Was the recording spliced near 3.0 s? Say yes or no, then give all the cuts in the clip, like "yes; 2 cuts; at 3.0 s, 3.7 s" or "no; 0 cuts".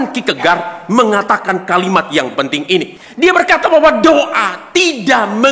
yes; 1 cut; at 3.0 s